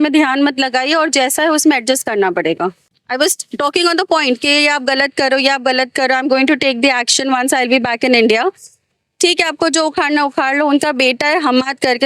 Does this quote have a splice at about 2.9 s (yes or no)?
yes